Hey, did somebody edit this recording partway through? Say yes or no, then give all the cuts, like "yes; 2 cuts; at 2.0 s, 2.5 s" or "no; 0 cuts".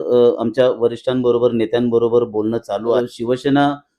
yes; 1 cut; at 3.0 s